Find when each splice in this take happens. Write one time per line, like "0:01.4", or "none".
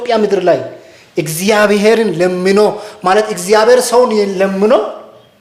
none